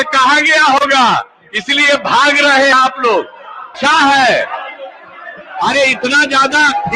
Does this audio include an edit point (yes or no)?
yes